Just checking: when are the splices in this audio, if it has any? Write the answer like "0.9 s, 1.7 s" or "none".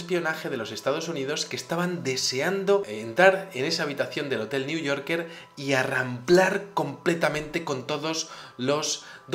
1.8 s